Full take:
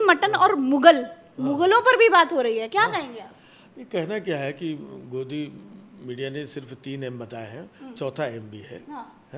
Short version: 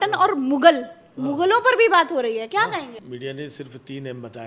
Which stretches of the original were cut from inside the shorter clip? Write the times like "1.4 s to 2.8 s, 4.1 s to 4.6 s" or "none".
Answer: 3.2 s to 5.9 s